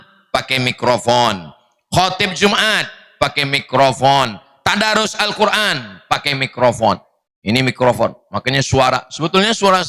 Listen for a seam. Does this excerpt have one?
no; 0 cuts

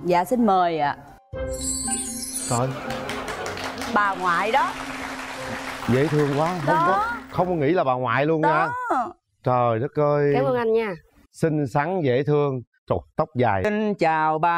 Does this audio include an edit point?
yes; 1 cut; at 13.6 s

